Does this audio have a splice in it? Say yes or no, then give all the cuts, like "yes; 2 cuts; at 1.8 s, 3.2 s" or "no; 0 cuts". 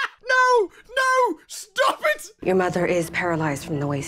no; 0 cuts